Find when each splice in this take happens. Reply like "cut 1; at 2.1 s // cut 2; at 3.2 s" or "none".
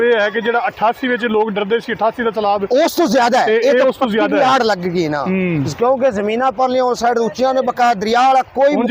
none